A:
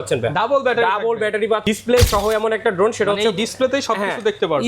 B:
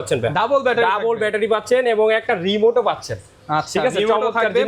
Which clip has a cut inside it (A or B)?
A